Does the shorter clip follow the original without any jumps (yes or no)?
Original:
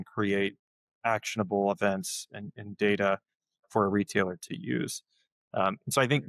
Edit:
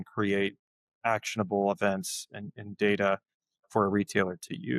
yes